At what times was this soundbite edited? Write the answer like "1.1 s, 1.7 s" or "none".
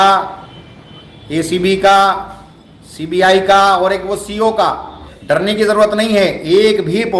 5.1 s